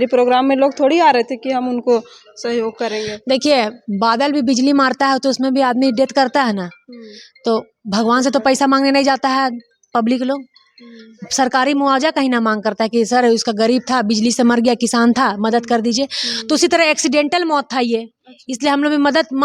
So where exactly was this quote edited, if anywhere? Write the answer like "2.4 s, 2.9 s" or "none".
none